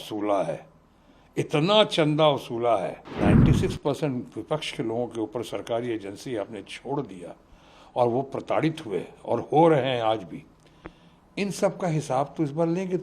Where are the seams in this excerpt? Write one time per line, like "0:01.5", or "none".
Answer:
0:03.2